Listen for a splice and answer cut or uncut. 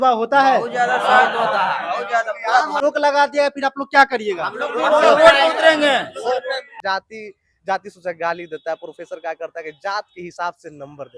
cut